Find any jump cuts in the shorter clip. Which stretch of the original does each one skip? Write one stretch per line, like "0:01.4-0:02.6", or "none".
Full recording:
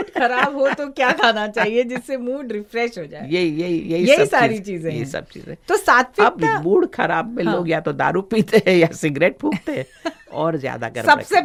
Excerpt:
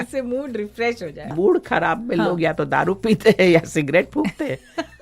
0:03.3-0:06.6